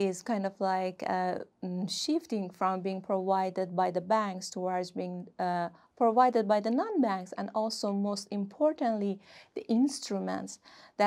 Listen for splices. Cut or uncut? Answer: uncut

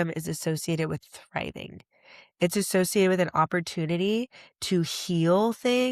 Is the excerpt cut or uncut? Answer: uncut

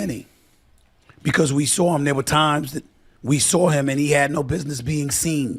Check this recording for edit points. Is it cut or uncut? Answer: cut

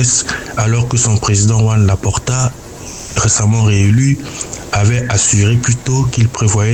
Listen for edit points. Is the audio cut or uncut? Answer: uncut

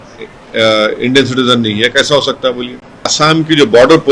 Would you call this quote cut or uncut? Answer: cut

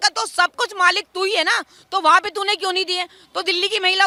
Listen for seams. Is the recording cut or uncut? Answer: uncut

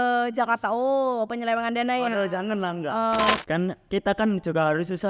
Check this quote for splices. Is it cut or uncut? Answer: cut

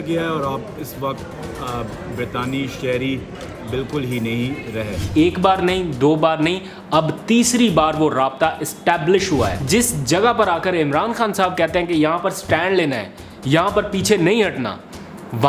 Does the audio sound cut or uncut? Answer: cut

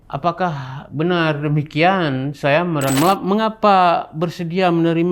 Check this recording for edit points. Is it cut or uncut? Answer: cut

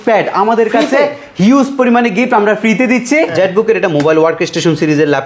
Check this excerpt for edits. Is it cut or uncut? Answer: cut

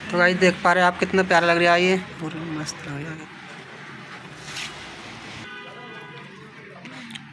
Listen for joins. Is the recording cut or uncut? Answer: cut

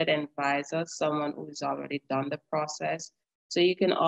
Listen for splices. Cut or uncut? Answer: uncut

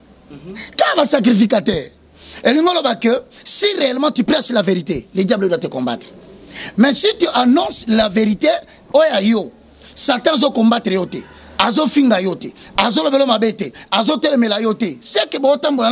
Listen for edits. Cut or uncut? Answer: uncut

